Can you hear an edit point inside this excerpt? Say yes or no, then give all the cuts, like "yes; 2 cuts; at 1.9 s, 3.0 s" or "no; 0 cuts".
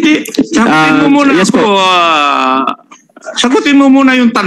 no; 0 cuts